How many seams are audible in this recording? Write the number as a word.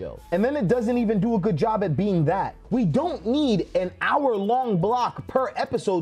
one